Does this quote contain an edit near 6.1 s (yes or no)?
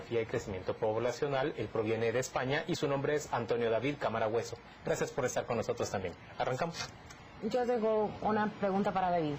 no